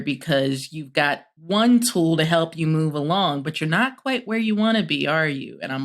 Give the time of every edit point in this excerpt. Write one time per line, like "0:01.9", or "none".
0:01.3